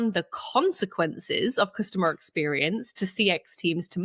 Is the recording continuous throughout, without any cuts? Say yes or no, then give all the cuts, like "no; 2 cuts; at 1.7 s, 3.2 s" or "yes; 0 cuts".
yes; 0 cuts